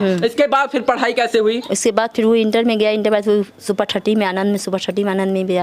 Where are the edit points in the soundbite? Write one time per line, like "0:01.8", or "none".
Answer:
none